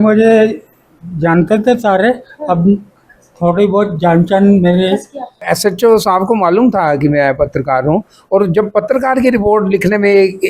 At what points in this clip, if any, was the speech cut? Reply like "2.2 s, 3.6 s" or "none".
5.5 s